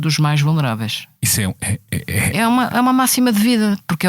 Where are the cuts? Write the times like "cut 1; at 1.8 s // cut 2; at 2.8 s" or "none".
cut 1; at 1.1 s